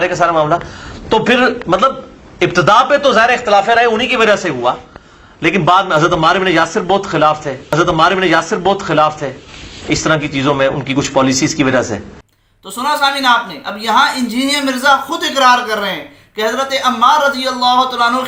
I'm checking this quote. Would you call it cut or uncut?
uncut